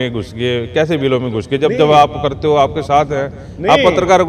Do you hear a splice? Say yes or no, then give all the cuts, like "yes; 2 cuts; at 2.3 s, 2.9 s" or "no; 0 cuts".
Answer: no; 0 cuts